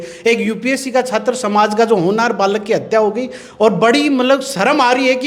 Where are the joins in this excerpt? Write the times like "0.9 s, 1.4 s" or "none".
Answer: none